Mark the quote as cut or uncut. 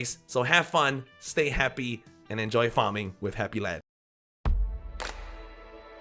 cut